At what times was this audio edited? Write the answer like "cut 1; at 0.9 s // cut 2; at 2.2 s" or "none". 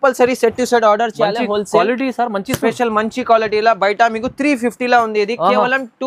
none